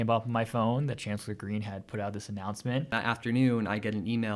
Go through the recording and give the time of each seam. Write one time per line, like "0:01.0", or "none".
0:02.9